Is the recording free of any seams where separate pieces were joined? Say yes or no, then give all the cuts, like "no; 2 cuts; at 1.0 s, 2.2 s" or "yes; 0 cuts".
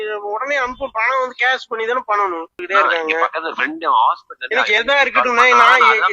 no; 1 cut; at 2.6 s